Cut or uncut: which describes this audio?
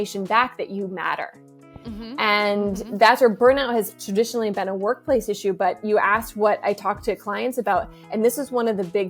uncut